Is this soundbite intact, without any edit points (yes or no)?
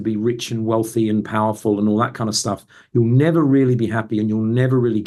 yes